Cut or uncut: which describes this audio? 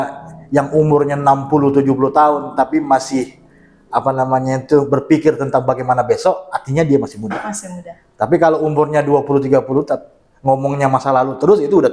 uncut